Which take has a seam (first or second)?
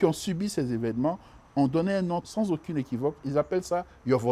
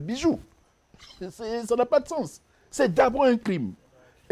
first